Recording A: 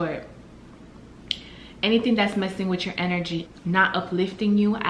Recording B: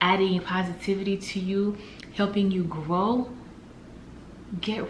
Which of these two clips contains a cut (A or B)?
A